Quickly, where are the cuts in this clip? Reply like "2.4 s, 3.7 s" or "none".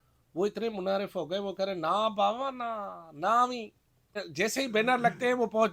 4.2 s